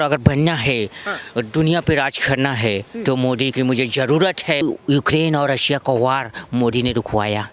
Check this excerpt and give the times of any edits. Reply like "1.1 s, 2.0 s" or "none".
4.6 s